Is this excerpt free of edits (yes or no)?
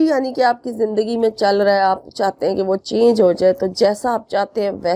yes